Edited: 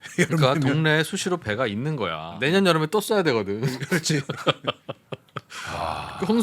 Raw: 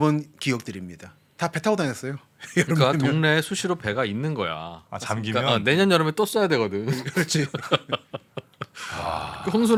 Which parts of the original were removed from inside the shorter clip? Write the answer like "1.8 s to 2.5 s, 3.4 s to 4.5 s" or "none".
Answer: 4.8 s to 5.6 s